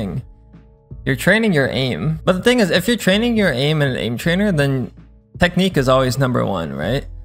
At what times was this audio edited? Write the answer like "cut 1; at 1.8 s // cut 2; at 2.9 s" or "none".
cut 1; at 2.1 s